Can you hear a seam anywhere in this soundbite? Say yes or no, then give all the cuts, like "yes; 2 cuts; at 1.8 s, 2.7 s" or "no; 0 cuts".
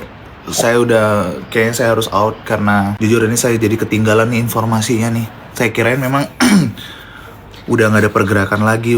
yes; 1 cut; at 2.9 s